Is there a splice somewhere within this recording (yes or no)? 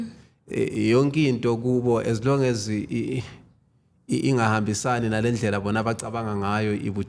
no